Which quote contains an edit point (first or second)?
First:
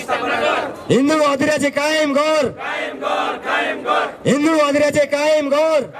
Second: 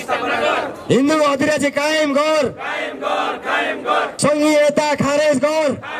second